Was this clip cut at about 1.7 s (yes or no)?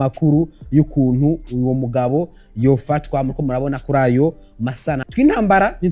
no